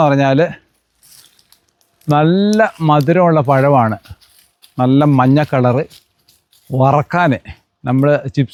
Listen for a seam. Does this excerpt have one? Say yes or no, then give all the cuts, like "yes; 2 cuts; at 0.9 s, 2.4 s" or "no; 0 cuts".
no; 0 cuts